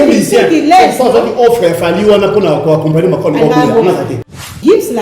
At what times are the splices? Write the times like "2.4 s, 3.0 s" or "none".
4.1 s